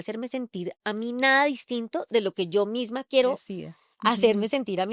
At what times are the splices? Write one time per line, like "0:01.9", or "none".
none